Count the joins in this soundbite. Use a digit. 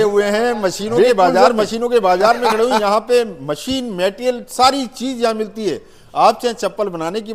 1